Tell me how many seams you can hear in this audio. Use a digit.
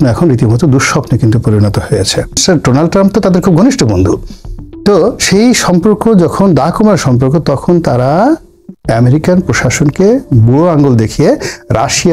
1